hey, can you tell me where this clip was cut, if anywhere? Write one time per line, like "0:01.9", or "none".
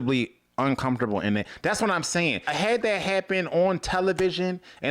0:02.5